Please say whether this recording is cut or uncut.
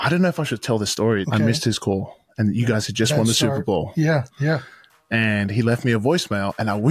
cut